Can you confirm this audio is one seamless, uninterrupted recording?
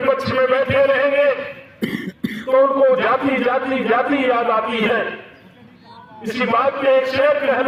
yes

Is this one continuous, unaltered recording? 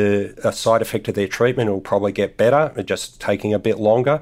yes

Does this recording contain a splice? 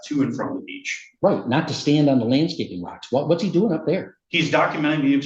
no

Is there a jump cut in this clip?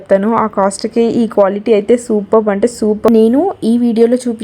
yes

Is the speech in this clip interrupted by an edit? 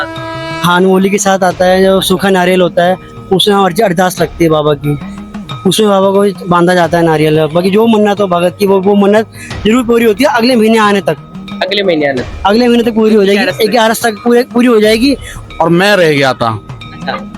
yes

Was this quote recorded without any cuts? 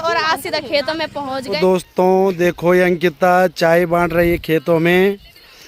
no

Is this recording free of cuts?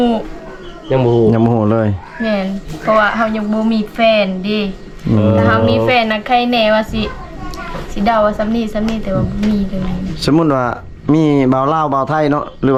yes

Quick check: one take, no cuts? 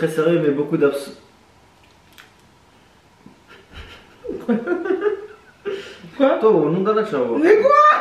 yes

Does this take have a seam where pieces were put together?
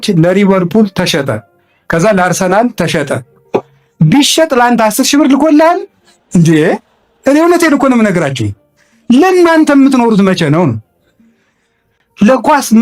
no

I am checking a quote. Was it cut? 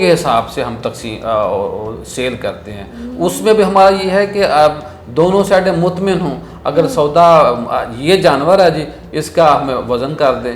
no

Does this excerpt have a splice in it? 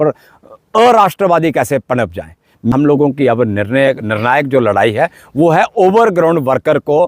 yes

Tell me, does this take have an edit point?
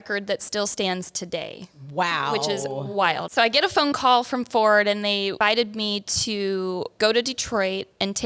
yes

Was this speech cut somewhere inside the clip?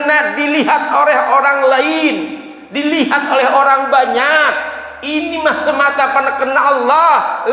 no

